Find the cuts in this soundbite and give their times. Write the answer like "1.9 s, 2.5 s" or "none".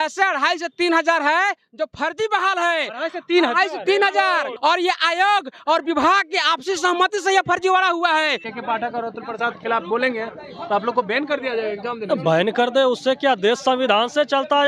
4.5 s, 8.5 s